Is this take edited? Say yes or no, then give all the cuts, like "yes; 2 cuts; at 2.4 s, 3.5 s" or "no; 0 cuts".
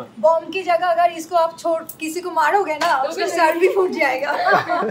no; 0 cuts